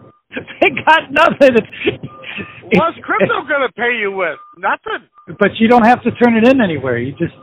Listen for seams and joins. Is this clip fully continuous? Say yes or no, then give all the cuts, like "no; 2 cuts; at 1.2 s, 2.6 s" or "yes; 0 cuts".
no; 2 cuts; at 1.7 s, 5.2 s